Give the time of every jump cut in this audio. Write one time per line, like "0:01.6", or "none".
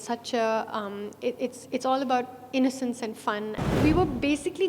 0:03.8